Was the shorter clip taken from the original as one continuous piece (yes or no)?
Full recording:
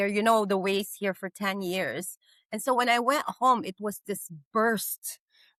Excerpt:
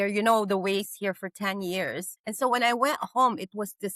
no